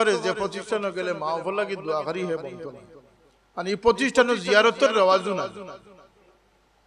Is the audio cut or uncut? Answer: uncut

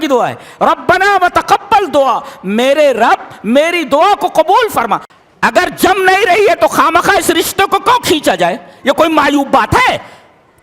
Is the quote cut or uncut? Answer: cut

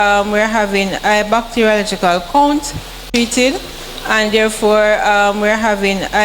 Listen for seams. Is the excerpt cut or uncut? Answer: cut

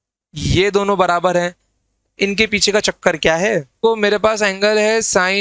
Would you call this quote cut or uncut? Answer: cut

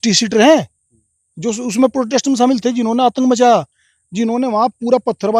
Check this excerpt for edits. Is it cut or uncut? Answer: uncut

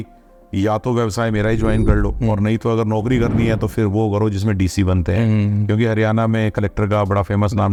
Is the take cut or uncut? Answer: uncut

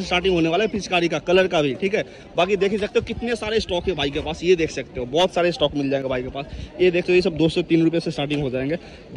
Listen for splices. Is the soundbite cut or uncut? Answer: uncut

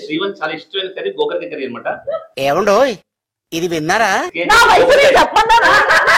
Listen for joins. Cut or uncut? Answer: cut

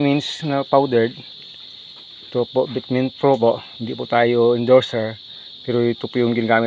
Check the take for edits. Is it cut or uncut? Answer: uncut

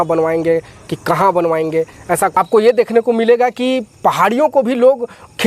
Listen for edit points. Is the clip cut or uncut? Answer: cut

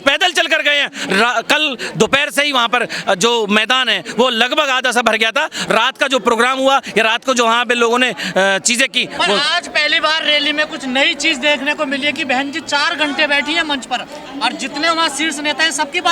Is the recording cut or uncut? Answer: uncut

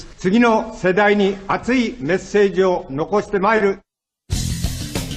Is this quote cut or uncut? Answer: cut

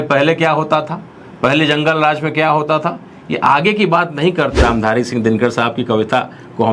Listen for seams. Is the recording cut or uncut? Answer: cut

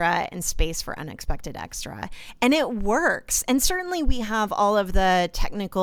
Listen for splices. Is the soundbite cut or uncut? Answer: uncut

